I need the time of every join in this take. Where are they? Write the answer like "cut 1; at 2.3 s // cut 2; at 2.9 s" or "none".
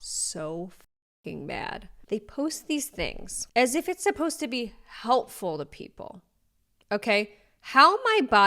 none